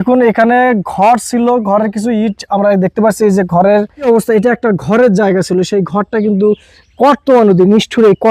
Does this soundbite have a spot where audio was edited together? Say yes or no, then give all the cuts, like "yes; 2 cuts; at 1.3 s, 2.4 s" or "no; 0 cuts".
yes; 1 cut; at 4.0 s